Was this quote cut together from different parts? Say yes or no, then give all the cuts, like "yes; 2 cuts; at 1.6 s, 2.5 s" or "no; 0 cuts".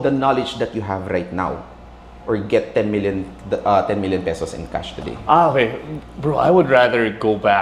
no; 0 cuts